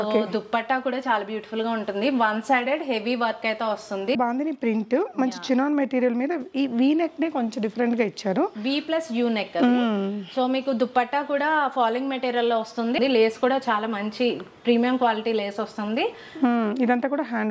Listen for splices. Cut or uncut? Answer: cut